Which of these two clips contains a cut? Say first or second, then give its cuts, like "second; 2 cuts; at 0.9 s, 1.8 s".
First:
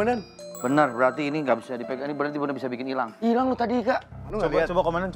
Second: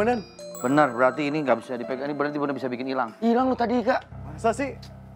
first; 1 cut; at 4.2 s